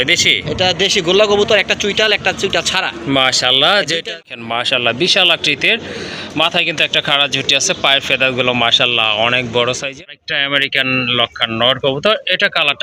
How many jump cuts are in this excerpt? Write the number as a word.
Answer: two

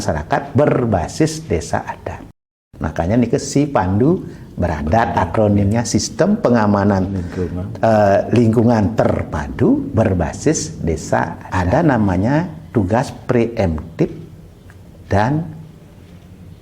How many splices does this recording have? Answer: two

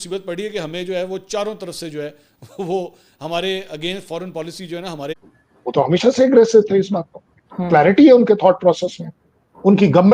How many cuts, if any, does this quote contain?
one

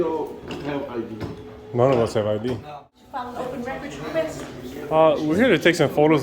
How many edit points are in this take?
one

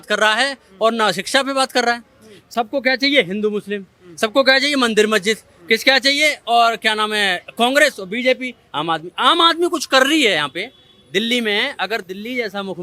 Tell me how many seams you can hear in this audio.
zero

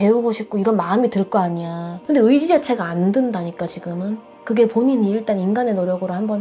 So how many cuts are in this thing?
one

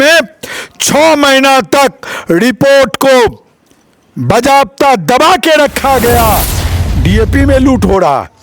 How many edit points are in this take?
one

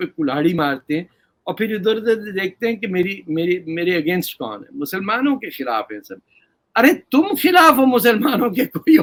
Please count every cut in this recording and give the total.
zero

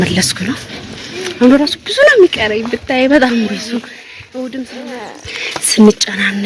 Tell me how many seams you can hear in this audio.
one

